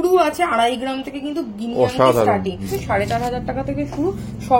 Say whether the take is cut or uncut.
cut